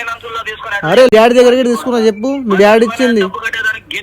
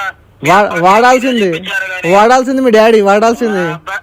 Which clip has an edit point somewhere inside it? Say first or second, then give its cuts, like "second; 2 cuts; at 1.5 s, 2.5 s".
first; 1 cut; at 1.1 s